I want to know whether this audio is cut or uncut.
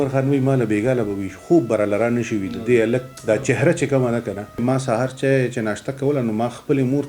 cut